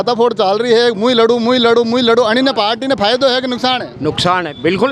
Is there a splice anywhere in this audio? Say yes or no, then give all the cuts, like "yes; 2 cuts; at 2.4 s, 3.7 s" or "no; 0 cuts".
no; 0 cuts